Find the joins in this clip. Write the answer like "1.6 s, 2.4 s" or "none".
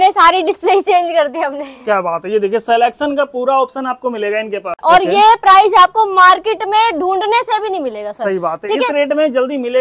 4.8 s